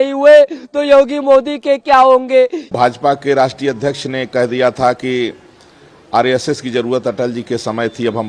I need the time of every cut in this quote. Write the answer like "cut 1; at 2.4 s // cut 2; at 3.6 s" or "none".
cut 1; at 2.7 s